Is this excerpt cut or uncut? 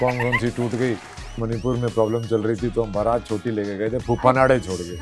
cut